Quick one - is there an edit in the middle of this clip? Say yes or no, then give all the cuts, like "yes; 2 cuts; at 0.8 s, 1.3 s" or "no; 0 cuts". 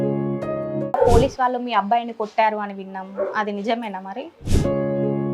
yes; 1 cut; at 1.0 s